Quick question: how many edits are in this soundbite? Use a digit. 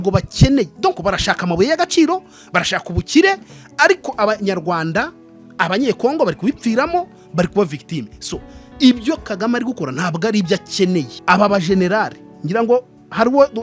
1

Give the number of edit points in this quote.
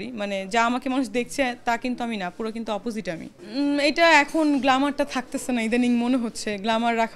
1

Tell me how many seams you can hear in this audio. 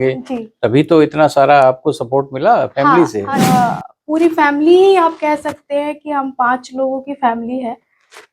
1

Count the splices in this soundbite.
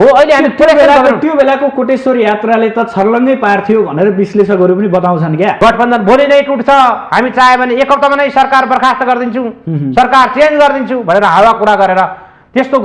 1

